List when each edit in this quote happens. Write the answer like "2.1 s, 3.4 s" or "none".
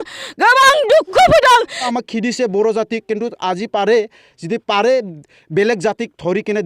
1.8 s